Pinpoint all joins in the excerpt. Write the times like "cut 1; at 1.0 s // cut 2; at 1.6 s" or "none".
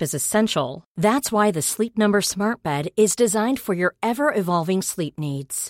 none

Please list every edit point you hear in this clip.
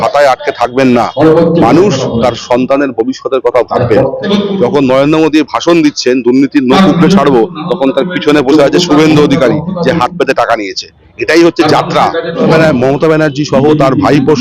cut 1; at 4.3 s // cut 2; at 12.4 s

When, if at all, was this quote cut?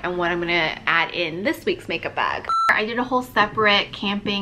cut 1; at 2.6 s

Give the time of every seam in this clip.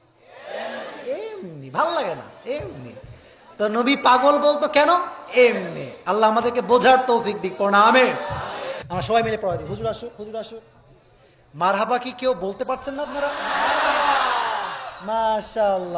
cut 1; at 8.7 s

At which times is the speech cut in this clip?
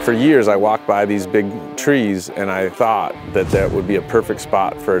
cut 1; at 2.7 s

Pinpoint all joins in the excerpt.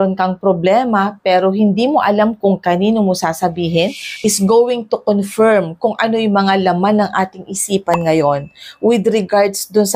cut 1; at 4.1 s

